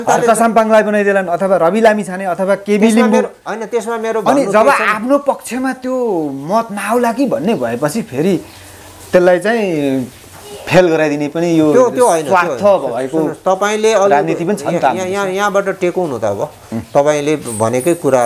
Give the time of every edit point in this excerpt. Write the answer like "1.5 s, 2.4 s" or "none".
none